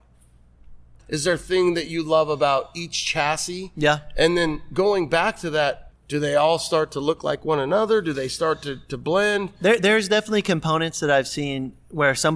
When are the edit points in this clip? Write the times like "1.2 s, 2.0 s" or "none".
1.0 s, 5.9 s